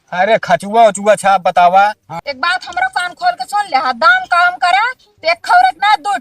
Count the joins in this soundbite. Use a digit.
1